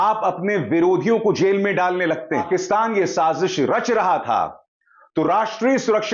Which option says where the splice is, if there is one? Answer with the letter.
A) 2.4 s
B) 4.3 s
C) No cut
A